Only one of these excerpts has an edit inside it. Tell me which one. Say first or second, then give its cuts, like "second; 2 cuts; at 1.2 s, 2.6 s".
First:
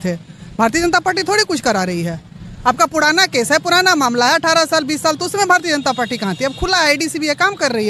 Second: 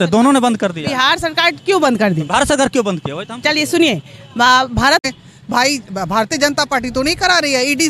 second; 1 cut; at 5.0 s